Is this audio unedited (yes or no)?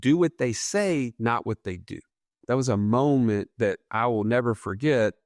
no